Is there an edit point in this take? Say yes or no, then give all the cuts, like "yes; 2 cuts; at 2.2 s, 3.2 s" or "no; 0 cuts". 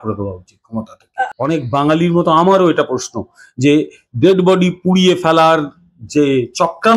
yes; 1 cut; at 1.2 s